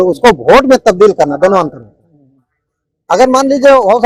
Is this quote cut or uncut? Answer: uncut